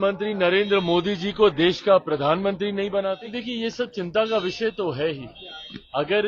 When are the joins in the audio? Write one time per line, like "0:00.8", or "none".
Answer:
0:03.3